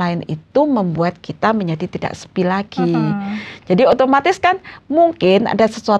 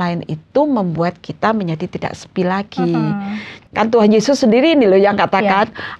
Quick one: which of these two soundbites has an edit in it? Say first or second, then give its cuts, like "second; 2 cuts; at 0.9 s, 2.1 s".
second; 1 cut; at 3.5 s